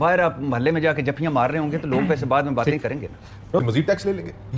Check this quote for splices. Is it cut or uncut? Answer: cut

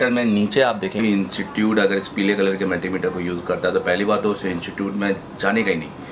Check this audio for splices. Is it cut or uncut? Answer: cut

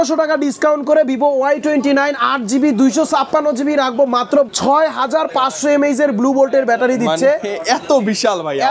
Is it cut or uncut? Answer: cut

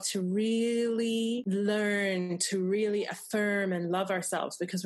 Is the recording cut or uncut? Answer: cut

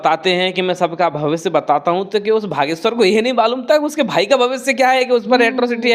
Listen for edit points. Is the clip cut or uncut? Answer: uncut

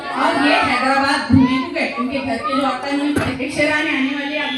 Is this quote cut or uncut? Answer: cut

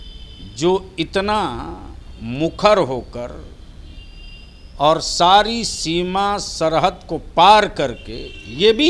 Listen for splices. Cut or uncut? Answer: uncut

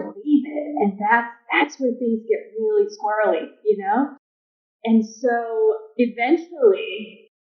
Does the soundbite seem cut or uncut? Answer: uncut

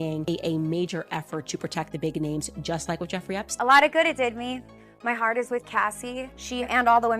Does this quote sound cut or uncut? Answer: cut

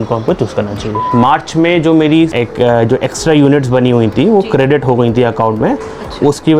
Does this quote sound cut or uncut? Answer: cut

